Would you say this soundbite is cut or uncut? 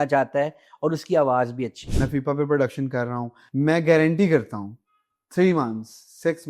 cut